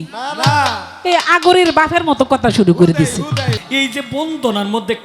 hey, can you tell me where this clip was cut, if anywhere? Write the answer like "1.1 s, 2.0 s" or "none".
3.6 s